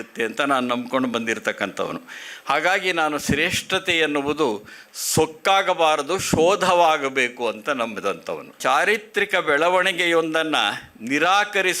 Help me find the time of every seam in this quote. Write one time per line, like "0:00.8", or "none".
0:08.6